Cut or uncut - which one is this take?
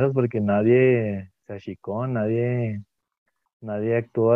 uncut